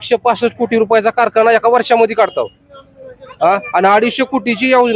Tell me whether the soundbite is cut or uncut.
uncut